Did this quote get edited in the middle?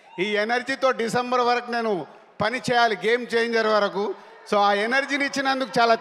no; 0 cuts

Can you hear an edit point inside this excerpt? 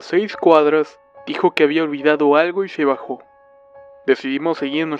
yes; 1 cut; at 2.0 s

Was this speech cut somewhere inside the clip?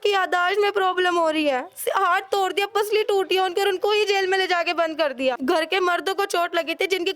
yes; 1 cut; at 5.4 s

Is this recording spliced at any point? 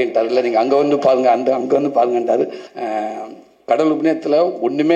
yes; 1 cut; at 2.7 s

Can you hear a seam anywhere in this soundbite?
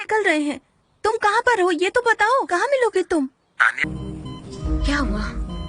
yes; 1 cut; at 3.8 s

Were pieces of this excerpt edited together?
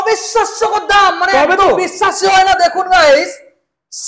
no; 0 cuts

